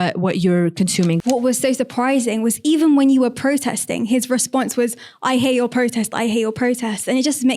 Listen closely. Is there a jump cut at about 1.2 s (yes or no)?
yes